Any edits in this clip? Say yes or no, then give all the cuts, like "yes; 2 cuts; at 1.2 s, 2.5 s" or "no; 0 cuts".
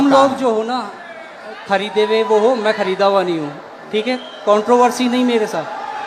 no; 0 cuts